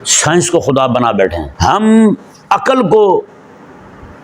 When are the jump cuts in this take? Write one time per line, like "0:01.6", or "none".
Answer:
0:01.5